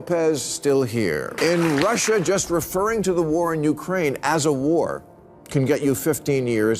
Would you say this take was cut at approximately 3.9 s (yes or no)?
no